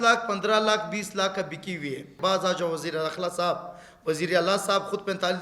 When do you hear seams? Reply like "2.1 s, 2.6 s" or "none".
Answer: 2.1 s